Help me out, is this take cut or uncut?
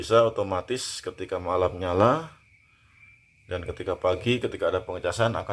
uncut